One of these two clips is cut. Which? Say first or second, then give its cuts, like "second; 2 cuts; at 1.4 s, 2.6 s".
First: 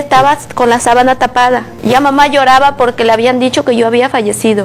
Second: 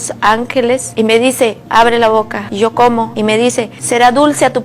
second; 3 cuts; at 0.9 s, 2.4 s, 3.4 s